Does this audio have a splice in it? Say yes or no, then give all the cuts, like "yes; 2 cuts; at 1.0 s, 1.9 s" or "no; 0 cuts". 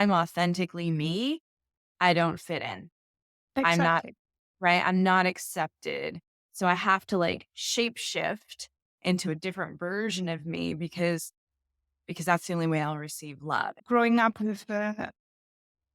yes; 1 cut; at 13.8 s